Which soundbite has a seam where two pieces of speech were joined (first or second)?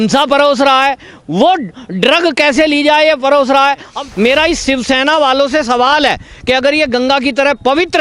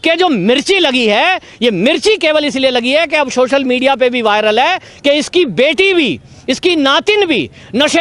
first